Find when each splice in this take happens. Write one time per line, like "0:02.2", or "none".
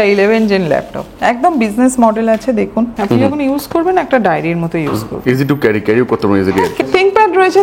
0:02.9
0:06.8